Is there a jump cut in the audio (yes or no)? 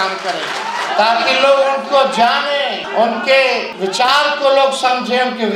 yes